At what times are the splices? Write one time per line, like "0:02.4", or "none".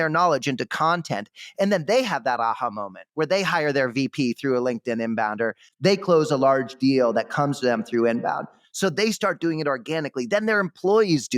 none